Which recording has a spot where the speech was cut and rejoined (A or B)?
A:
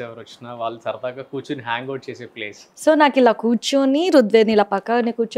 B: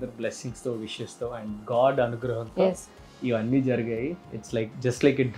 A